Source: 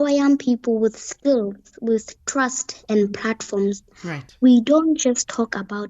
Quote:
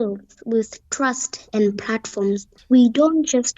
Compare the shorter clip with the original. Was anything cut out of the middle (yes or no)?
yes